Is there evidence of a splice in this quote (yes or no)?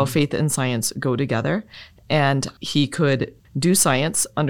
yes